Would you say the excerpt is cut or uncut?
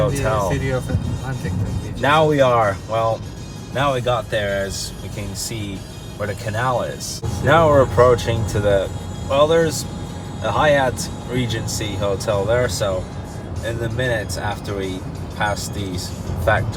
uncut